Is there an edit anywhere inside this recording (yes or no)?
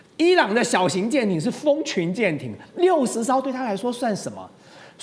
no